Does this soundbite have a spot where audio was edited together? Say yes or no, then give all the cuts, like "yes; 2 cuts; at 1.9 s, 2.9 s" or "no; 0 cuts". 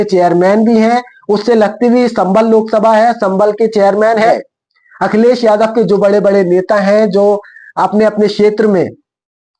yes; 1 cut; at 4.3 s